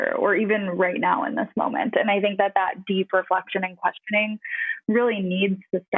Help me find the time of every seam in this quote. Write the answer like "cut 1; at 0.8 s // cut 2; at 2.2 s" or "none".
none